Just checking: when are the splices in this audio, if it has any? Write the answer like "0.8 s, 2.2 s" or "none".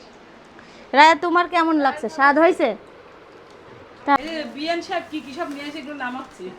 4.2 s